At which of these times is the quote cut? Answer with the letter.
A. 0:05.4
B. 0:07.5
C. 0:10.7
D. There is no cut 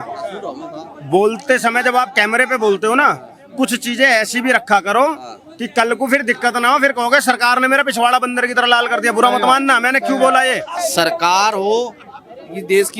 C